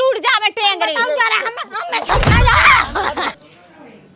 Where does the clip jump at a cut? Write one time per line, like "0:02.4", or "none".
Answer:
0:03.1